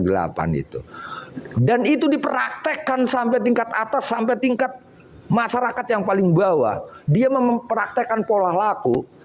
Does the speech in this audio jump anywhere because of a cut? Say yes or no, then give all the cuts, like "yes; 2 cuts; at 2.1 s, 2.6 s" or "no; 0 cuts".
no; 0 cuts